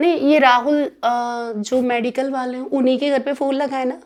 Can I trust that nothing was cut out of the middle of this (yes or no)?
yes